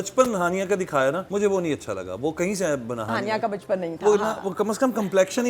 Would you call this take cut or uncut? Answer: cut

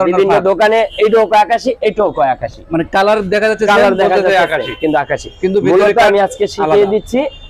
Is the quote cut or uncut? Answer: uncut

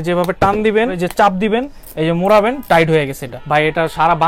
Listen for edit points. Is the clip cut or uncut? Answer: cut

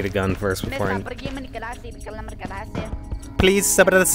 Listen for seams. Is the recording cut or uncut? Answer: cut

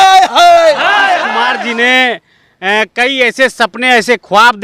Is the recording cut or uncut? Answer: cut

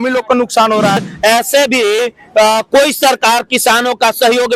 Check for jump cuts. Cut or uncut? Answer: cut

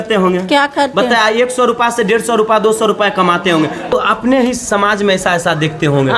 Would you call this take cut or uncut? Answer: cut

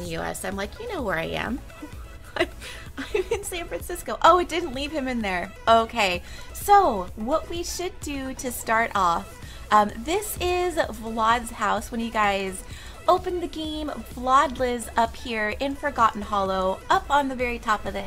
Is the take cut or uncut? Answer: uncut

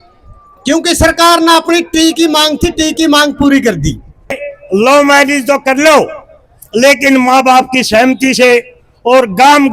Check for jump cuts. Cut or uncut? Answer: cut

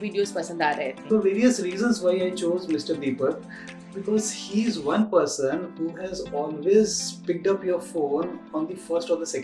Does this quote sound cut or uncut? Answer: cut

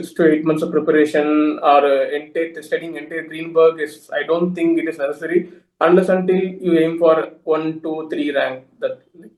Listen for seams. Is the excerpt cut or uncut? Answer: uncut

